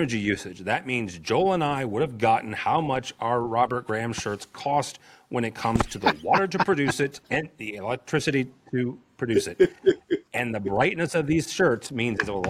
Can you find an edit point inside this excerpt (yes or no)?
yes